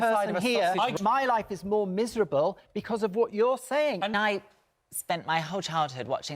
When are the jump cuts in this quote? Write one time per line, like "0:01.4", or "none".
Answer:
0:00.9
0:04.1